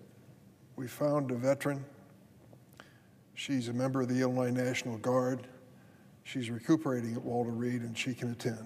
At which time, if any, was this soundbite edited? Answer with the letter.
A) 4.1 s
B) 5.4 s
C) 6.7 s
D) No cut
A